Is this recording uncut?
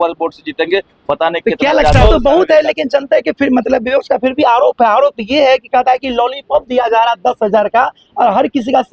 no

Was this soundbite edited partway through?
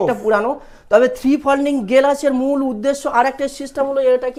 no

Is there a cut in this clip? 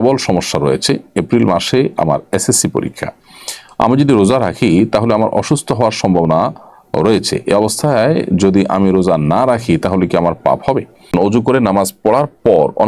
yes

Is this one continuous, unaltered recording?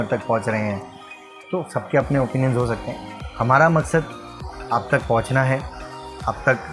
yes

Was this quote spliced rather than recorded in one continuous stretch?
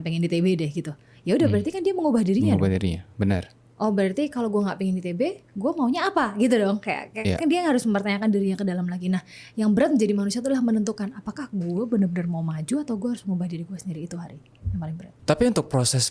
no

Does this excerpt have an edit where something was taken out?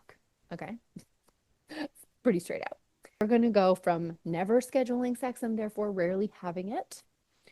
yes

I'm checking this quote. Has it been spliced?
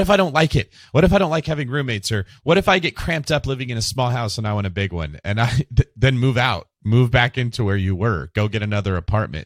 no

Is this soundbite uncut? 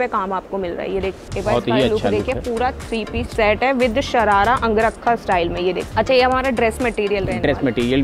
no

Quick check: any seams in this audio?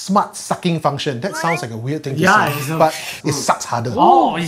yes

